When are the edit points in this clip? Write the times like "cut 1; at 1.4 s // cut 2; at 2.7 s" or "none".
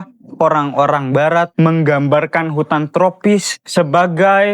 cut 1; at 1.5 s